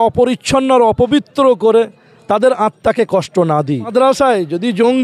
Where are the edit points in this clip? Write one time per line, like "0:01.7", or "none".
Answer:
0:03.9

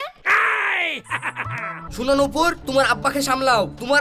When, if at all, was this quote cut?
0:01.9

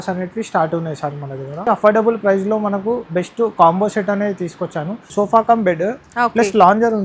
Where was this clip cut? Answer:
0:01.7
0:05.1

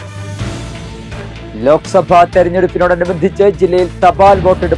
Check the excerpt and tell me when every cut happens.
0:01.2

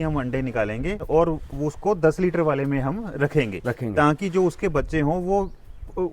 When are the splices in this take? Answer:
0:01.0

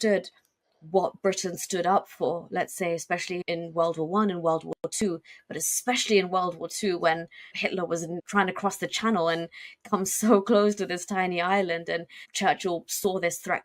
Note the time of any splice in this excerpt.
none

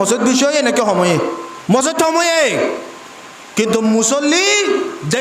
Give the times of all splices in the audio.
0:01.5

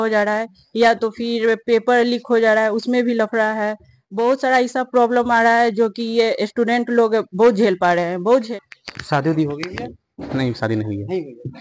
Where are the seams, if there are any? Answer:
0:08.4

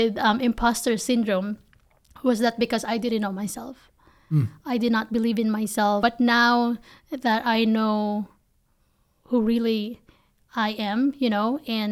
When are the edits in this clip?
0:06.0

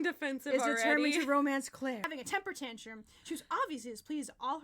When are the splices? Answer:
0:02.2

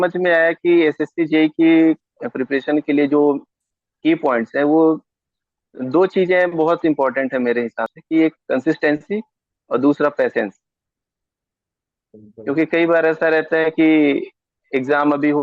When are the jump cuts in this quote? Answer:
none

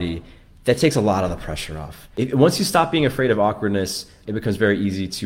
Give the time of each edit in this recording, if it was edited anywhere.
0:02.0
0:04.2

